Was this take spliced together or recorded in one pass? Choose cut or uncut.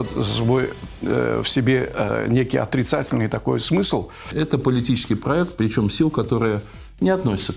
cut